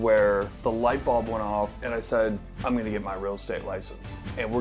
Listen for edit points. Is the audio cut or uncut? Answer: uncut